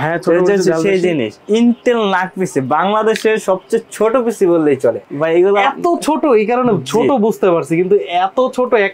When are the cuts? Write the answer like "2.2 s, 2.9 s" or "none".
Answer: 1.4 s, 5.0 s